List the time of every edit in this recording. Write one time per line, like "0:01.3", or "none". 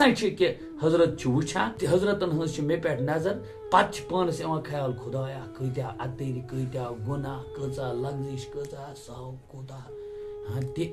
0:01.7